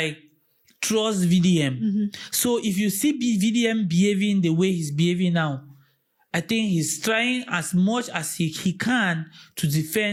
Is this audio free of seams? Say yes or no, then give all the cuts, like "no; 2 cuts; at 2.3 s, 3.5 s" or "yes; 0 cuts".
yes; 0 cuts